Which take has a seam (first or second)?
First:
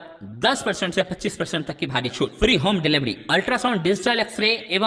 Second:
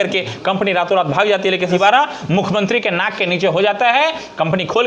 second